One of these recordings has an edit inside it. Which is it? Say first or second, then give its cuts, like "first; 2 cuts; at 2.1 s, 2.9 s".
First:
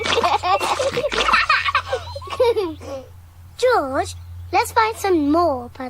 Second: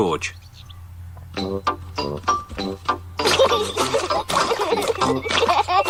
first; 1 cut; at 1.6 s